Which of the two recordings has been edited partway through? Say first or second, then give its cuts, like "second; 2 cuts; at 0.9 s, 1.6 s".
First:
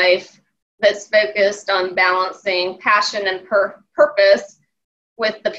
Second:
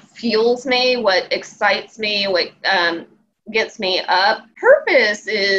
second; 1 cut; at 4.5 s